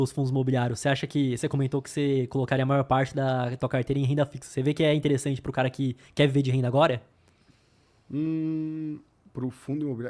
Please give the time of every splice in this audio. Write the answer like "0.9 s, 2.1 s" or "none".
none